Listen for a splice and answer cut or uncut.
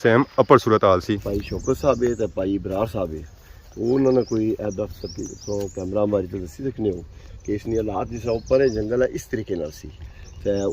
cut